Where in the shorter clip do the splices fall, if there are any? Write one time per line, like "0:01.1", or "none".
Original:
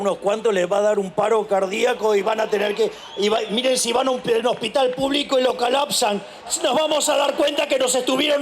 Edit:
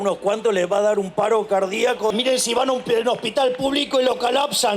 0:02.1